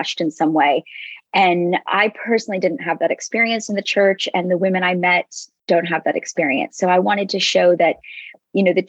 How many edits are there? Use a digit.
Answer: 0